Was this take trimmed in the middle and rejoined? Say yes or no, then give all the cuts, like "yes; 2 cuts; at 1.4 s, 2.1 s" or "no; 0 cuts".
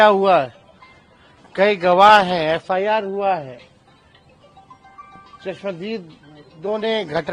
no; 0 cuts